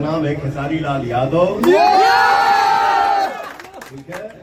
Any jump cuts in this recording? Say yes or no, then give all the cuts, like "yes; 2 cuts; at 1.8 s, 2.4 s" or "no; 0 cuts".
no; 0 cuts